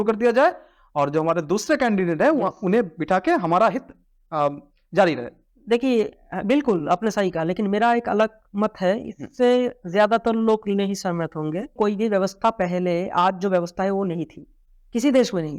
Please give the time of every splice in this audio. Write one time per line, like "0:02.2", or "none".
0:11.7